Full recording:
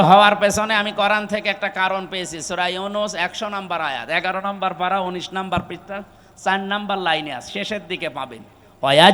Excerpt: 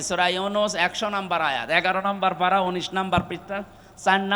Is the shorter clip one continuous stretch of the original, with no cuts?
yes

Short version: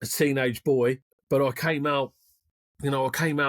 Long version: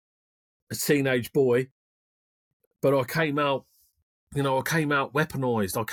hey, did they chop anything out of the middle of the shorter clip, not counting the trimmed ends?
yes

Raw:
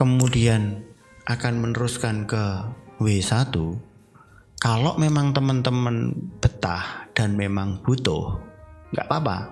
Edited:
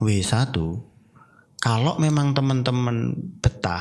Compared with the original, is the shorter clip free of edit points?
yes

